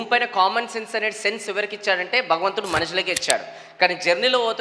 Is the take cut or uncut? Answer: uncut